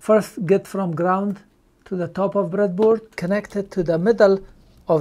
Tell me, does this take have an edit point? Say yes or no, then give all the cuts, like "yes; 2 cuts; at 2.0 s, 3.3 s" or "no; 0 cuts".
yes; 1 cut; at 3.1 s